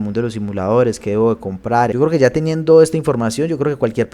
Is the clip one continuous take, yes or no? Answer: no